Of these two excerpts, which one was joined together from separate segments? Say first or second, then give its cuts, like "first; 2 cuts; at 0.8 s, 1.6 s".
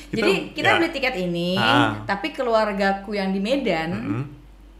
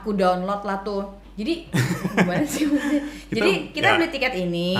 second; 1 cut; at 1.2 s